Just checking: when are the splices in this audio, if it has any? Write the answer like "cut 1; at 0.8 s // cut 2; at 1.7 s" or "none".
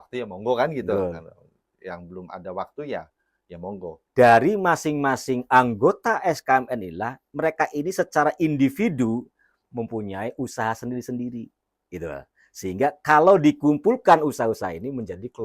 cut 1; at 4.0 s